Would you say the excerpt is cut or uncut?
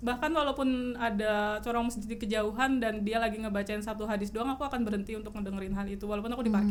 uncut